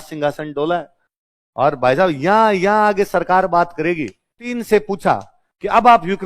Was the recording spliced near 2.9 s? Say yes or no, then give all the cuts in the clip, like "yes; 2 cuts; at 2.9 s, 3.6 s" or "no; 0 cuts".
no; 1 cut; at 4.5 s